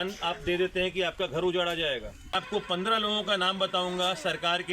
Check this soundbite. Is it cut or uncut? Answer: cut